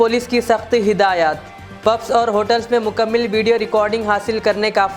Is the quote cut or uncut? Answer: uncut